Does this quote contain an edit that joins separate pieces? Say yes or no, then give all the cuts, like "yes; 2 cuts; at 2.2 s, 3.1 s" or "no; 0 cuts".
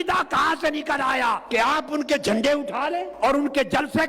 yes; 2 cuts; at 1.4 s, 3.1 s